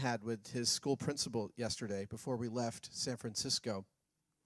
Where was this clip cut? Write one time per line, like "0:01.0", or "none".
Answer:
0:01.6